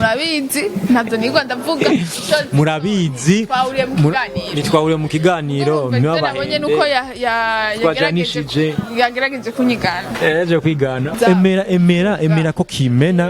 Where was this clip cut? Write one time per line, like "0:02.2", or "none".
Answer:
0:11.1